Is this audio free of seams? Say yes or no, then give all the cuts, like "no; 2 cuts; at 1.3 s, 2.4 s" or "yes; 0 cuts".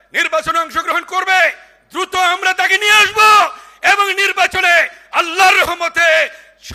yes; 0 cuts